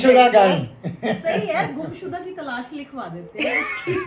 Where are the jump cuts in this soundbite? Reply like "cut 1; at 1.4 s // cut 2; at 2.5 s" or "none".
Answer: none